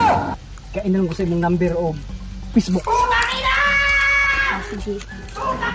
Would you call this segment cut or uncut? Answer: uncut